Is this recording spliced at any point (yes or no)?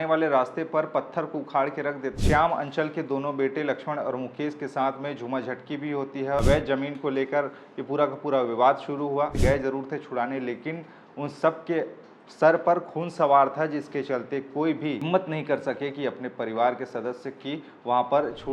yes